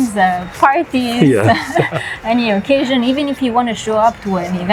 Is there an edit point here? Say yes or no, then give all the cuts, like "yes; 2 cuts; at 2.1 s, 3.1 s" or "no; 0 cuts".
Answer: no; 0 cuts